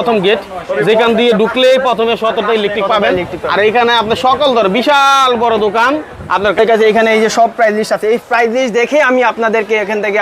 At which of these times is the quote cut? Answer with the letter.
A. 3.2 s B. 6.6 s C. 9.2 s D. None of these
B